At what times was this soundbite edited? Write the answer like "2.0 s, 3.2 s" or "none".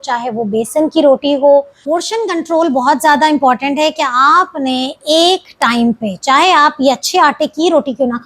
1.8 s